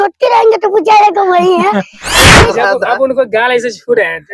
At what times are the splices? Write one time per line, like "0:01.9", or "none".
0:02.3